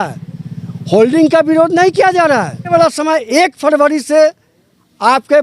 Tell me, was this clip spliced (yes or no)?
yes